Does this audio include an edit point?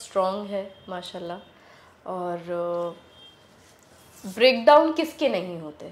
no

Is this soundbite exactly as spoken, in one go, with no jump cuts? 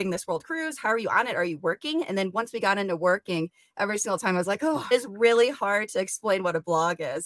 no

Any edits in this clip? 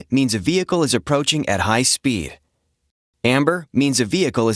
no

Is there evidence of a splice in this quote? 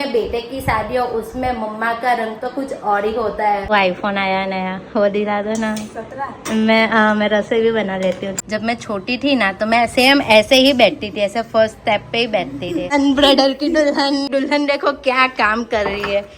yes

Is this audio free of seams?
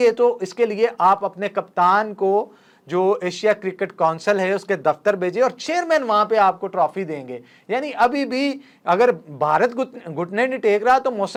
yes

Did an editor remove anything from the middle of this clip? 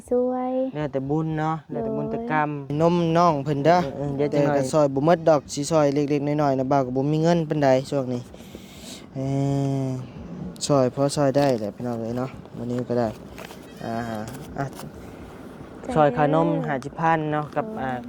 yes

